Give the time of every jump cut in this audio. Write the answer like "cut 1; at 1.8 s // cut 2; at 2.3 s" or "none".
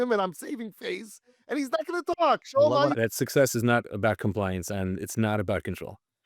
cut 1; at 2.9 s